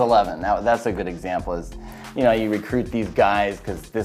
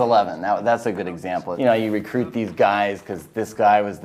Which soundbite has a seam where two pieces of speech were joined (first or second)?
second